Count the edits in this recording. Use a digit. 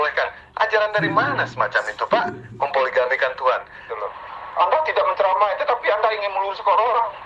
1